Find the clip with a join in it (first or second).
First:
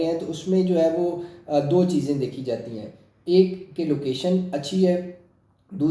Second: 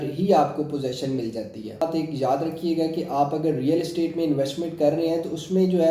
second